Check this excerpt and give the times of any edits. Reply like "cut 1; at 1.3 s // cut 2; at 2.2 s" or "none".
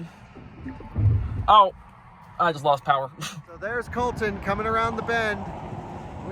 cut 1; at 3.6 s